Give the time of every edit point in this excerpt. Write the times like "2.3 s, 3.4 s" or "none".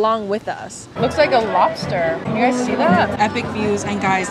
0.9 s, 2.3 s, 3.1 s